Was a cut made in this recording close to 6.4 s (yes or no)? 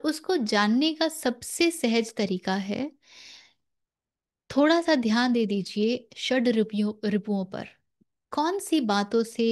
no